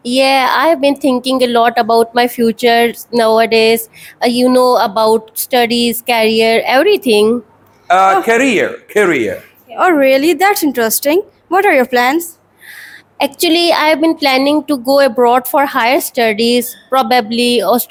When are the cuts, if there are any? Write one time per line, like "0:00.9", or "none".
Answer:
none